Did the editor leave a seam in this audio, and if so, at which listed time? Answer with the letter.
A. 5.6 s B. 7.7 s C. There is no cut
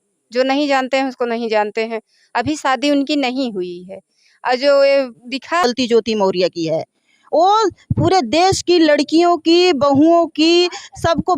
A